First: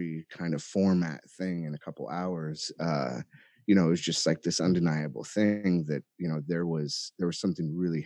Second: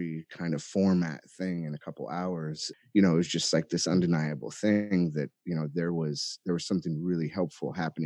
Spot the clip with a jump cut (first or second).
second